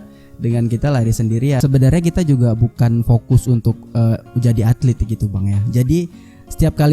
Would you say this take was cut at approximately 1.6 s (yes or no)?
yes